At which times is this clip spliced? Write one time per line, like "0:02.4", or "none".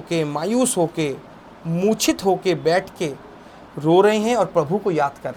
none